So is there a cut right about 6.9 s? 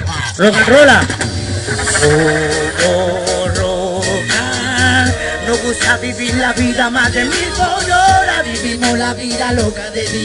no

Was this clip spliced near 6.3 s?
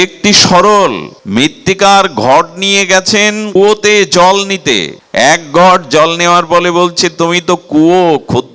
no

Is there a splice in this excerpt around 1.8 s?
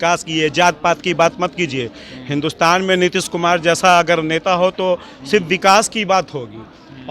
no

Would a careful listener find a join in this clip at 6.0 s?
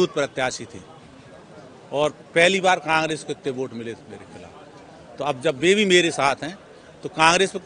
no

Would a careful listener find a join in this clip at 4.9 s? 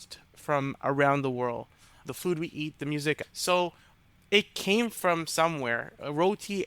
no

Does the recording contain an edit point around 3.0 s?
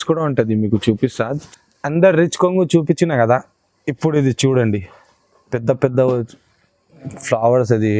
no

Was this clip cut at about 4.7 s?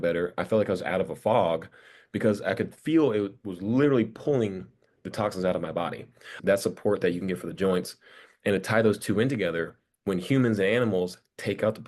no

